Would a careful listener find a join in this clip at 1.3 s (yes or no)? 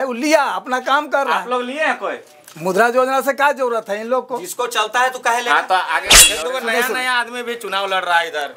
no